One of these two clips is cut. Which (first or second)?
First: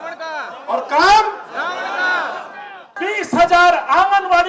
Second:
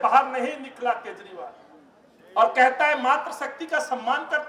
first